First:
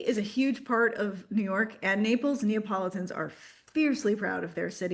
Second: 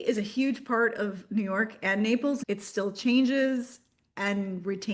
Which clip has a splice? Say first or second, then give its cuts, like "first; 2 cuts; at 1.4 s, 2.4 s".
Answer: second; 1 cut; at 2.4 s